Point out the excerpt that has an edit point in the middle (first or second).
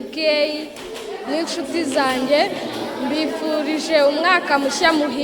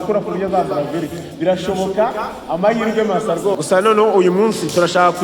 second